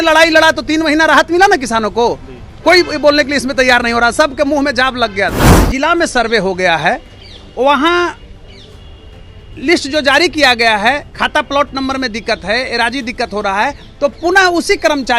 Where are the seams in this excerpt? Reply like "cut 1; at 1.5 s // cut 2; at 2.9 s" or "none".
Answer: cut 1; at 5.6 s